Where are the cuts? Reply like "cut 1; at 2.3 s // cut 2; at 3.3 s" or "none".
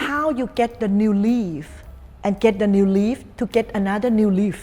none

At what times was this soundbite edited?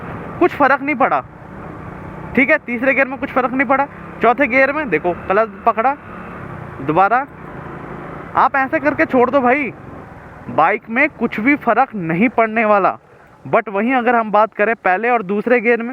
none

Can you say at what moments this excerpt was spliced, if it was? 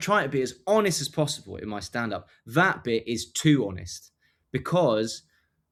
none

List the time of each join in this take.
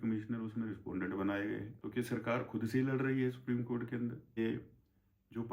cut 1; at 1.8 s // cut 2; at 4.4 s

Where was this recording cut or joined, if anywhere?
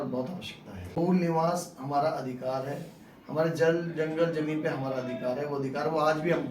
cut 1; at 0.9 s

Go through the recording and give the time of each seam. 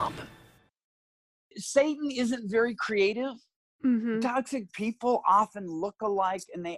cut 1; at 1.3 s

